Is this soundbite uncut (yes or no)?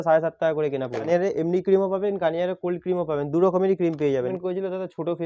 no